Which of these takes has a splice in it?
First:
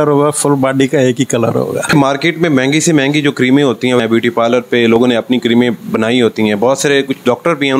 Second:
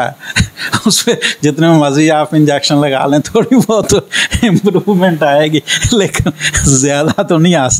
first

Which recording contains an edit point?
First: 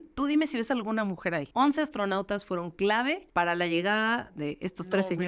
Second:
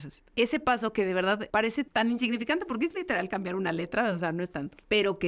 second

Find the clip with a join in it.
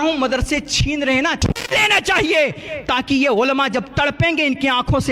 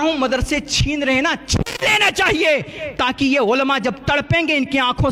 first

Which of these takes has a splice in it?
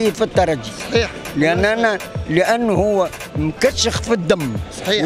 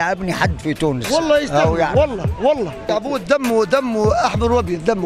second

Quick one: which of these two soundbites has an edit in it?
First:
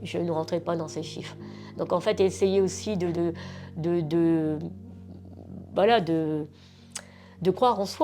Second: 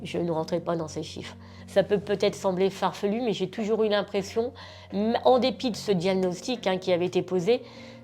second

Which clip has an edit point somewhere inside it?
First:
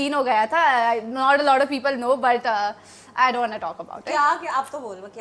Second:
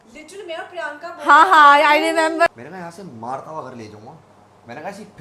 second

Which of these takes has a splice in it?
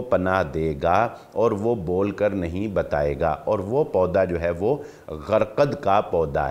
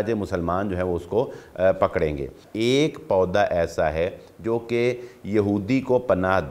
second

